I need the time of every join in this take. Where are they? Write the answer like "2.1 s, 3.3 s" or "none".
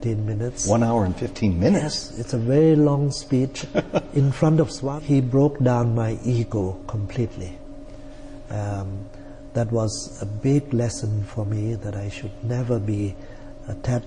4.8 s